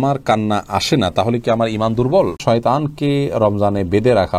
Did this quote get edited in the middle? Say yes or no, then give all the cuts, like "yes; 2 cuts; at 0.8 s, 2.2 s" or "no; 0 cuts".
yes; 1 cut; at 2.4 s